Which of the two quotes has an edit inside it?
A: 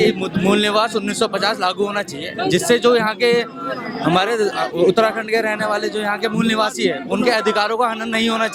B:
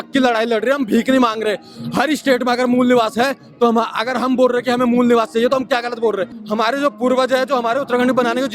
B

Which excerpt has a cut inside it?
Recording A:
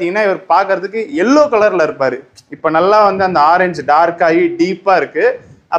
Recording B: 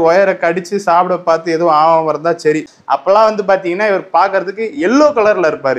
B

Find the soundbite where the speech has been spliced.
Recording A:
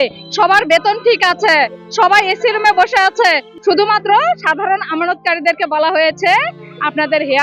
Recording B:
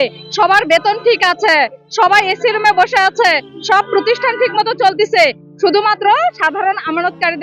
A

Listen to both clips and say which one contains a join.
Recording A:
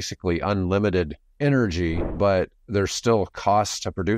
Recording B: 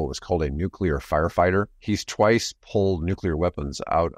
B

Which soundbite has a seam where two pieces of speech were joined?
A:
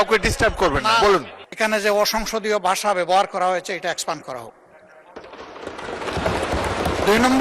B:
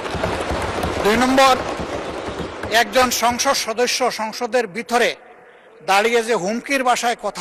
A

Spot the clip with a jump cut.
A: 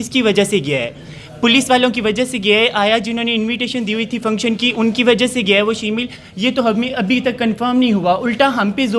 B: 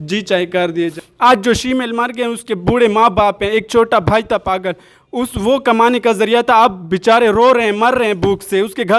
B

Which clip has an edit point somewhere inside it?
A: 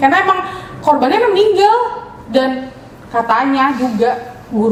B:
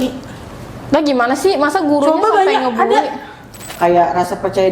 B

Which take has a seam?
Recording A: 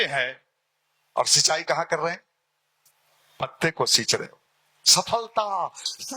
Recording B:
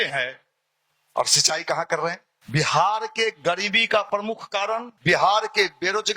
B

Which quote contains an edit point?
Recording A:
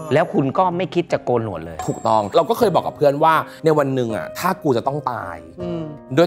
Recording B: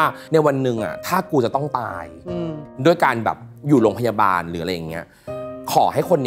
A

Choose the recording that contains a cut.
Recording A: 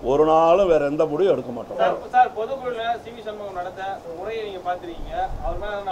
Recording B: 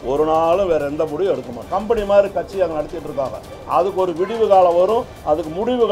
B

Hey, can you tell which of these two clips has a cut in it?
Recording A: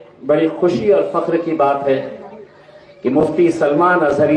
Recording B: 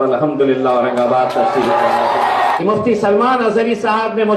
B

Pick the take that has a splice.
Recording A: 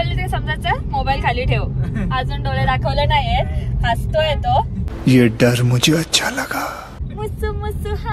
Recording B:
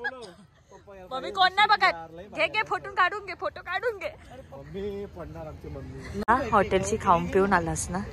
B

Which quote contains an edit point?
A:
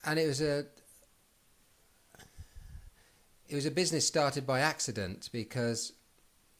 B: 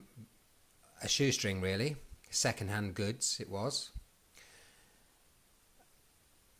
B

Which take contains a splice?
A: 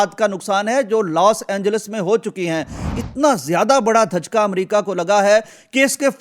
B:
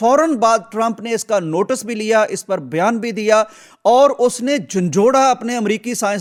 A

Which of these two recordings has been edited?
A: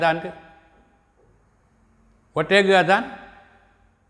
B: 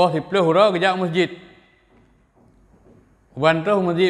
A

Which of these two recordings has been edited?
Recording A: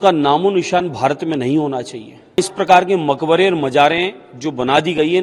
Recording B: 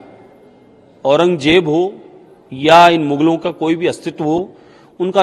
A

